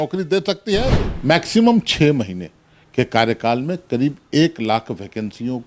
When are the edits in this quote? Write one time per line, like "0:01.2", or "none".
0:01.0

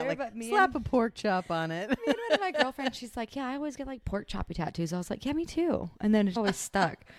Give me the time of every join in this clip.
none

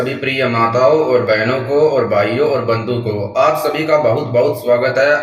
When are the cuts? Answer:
none

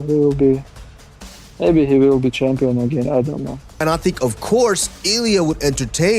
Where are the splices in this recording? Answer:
0:03.6

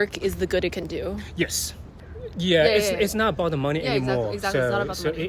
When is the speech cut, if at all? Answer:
none

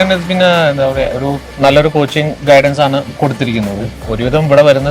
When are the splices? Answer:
0:01.4
0:04.0

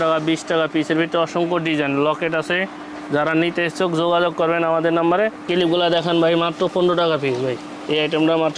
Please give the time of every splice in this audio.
none

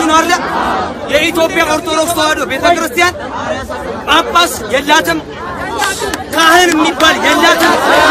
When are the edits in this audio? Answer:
none

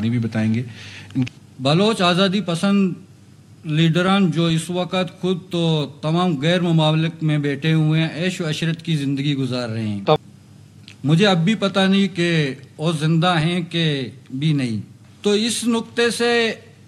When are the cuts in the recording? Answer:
0:01.3
0:10.2

